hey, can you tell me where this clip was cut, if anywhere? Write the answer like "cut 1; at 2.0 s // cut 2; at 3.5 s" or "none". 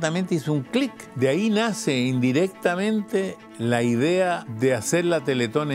cut 1; at 1.0 s // cut 2; at 4.5 s